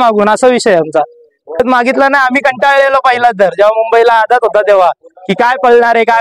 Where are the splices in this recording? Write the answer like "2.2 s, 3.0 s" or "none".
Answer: 1.6 s